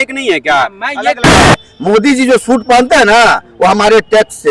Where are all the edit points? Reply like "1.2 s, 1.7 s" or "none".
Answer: 1.3 s